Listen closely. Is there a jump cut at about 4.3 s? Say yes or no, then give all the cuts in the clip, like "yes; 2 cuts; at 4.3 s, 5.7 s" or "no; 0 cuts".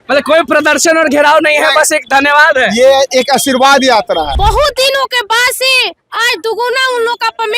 yes; 1 cut; at 4.3 s